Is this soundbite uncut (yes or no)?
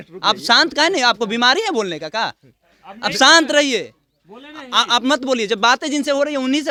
yes